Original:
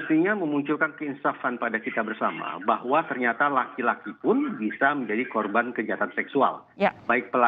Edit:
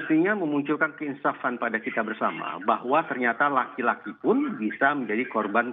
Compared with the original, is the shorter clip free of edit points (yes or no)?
yes